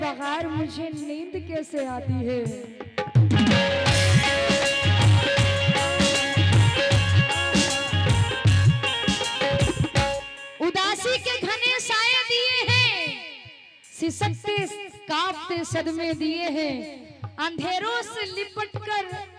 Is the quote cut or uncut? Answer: uncut